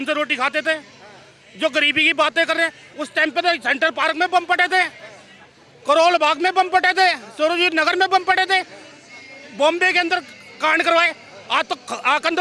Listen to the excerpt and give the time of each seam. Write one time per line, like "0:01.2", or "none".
0:02.8